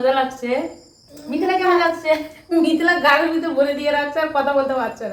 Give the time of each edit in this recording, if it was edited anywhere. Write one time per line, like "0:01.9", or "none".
none